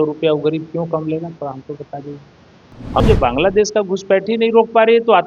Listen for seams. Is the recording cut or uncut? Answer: cut